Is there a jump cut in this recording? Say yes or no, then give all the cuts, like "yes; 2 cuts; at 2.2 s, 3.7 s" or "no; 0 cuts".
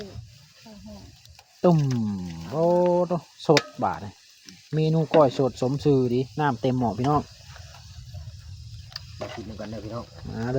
no; 0 cuts